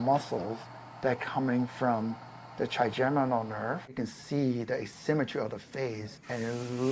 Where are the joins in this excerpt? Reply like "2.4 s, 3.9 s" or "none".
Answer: 3.9 s